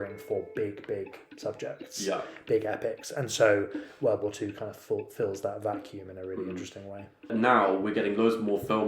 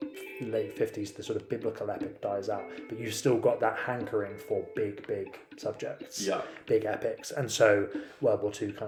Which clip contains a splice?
first; 1 cut; at 7.3 s

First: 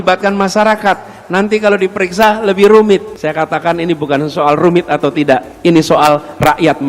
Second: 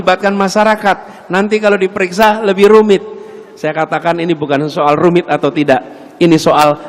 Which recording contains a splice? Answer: first; 2 cuts; at 3.1 s, 5.5 s

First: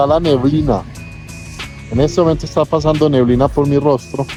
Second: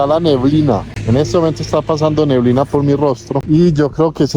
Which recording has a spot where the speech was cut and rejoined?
second; 2 cuts; at 0.9 s, 3.3 s

